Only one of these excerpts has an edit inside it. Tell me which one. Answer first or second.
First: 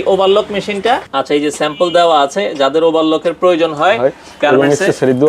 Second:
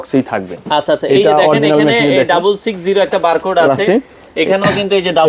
first